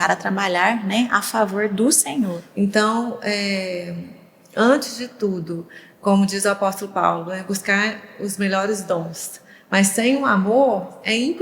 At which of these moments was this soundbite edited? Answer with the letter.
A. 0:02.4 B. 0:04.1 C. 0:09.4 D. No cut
A